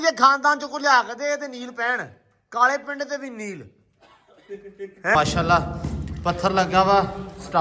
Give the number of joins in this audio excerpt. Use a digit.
1